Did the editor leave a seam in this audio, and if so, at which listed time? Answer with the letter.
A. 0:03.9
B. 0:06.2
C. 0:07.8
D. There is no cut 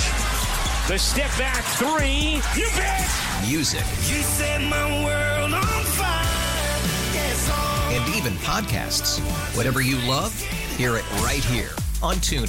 D